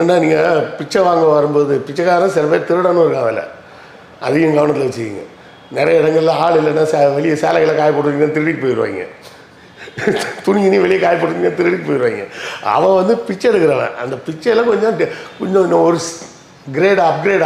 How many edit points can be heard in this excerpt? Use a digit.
0